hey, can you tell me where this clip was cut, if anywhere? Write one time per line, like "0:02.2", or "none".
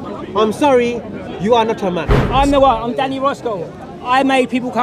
0:02.1